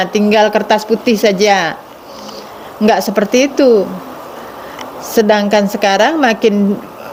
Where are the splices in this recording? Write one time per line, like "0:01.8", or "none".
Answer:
none